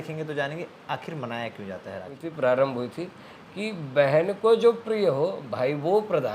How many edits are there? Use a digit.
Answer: 1